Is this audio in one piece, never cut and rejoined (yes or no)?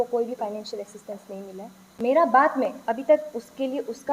no